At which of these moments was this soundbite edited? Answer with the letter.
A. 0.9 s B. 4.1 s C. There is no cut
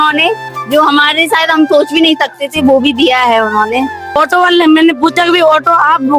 B